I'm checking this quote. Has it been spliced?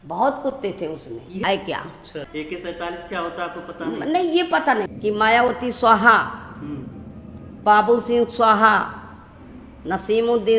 yes; 3 cuts; at 1.4 s, 2.3 s, 4.5 s

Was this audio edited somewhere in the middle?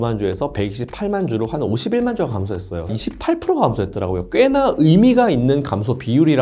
yes; 1 cut; at 2.9 s

